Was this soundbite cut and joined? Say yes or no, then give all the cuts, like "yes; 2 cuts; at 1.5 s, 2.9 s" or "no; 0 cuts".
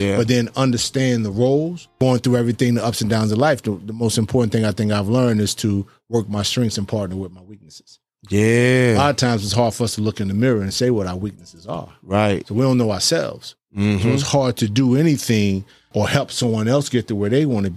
yes; 2 cuts; at 1.8 s, 15.8 s